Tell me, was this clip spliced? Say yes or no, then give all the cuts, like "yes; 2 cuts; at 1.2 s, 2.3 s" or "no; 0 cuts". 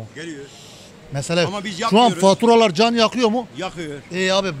no; 0 cuts